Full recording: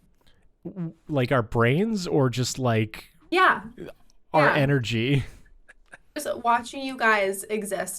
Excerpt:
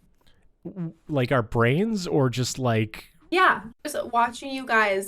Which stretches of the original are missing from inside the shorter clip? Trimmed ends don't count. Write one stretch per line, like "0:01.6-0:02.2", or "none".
0:03.7-0:06.1